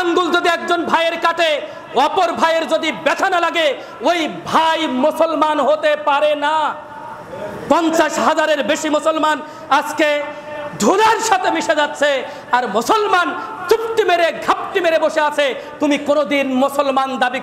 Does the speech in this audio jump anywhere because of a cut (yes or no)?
no